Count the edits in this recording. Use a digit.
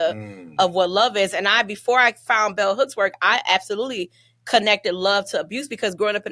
0